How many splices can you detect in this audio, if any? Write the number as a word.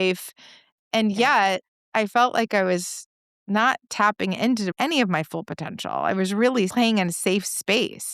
one